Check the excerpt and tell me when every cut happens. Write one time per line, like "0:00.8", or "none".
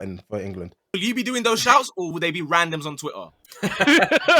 0:00.9
0:02.1

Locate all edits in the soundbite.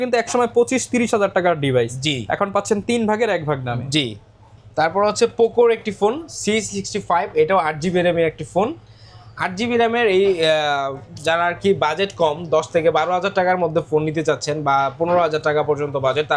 none

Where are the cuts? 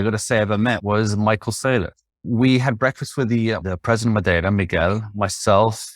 0:00.8
0:02.3
0:03.6

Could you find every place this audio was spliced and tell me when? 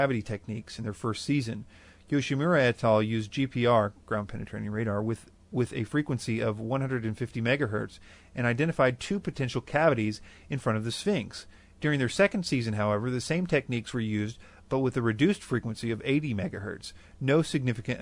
none

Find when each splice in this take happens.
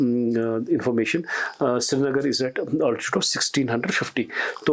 none

